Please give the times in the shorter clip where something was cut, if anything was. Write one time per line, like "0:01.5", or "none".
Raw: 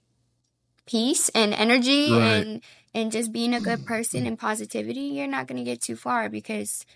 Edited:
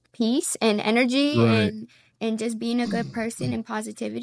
none